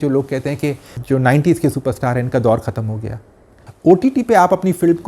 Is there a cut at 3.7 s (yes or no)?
yes